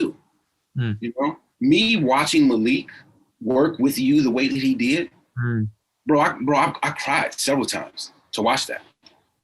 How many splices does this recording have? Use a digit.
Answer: 0